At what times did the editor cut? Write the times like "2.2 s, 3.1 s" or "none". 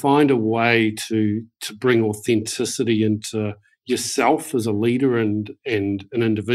none